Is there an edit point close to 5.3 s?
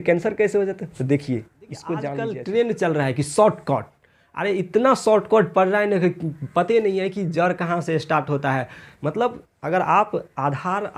no; 1 cut; at 2.2 s

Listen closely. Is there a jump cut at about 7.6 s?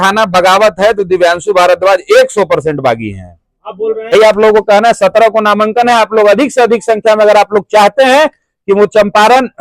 no; 1 cut; at 4.1 s

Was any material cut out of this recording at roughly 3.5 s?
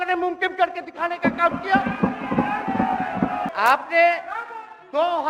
yes; 1 cut; at 3.5 s

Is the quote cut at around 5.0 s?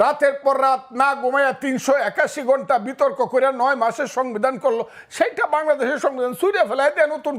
no; 0 cuts

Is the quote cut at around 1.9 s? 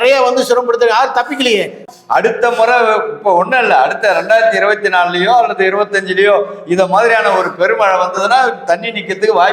yes; 1 cut; at 1.9 s

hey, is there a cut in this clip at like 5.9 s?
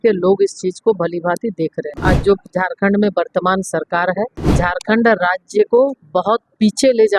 no; 2 cuts; at 1.9 s, 4.4 s

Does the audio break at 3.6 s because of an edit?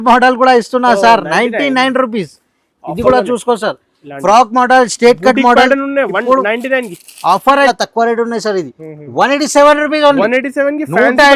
no; 1 cut; at 7.7 s

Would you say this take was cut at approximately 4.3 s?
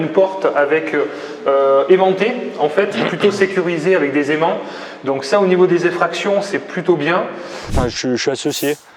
no; 1 cut; at 7.8 s

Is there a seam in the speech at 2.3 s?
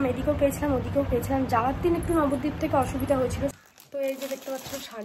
no; 1 cut; at 3.6 s

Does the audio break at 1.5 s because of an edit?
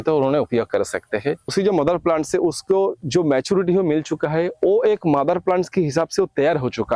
yes; 1 cut; at 1.5 s

